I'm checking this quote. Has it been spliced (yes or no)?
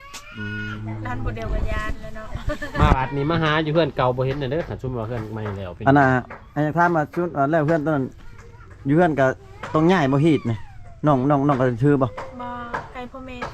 no